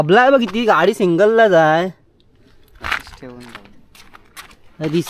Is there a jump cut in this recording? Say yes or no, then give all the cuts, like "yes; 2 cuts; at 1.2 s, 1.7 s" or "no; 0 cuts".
no; 0 cuts